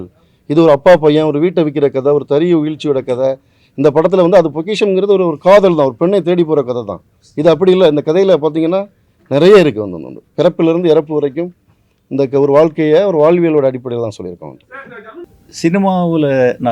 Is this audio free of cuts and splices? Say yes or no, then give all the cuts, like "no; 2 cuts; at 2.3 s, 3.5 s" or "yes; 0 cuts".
no; 1 cut; at 15.3 s